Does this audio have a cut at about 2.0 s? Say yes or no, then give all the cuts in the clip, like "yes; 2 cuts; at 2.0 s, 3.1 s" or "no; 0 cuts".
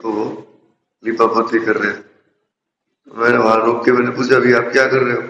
no; 0 cuts